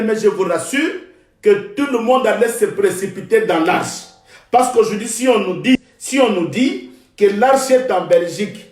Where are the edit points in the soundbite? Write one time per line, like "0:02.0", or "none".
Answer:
0:05.8